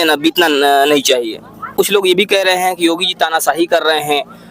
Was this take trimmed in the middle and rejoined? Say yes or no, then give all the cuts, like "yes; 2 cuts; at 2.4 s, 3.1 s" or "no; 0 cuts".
yes; 1 cut; at 1.8 s